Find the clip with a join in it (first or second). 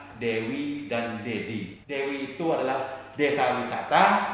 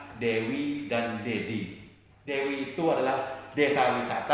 first